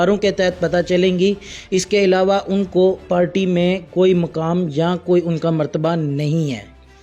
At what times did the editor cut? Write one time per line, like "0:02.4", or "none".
none

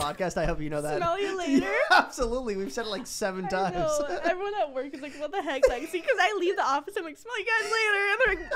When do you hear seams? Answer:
none

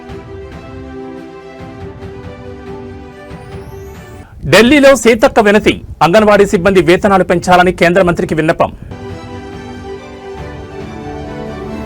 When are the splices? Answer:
0:04.1

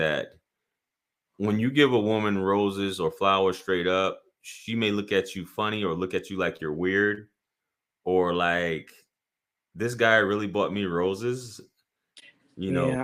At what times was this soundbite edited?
none

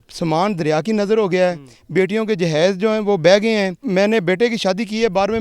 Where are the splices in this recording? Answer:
0:03.8

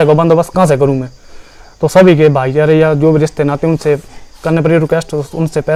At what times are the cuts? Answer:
none

